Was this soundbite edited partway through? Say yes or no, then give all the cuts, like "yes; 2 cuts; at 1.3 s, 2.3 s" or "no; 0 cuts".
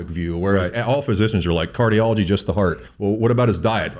yes; 1 cut; at 2.9 s